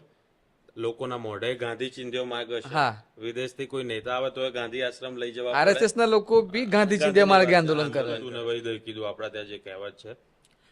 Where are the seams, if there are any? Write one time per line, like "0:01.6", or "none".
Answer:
0:08.2